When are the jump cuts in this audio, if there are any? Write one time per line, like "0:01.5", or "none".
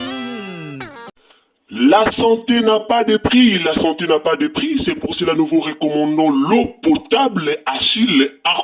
0:01.1